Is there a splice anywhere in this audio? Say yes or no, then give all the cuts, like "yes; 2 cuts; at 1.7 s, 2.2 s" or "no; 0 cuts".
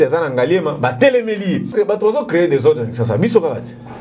yes; 1 cut; at 1.7 s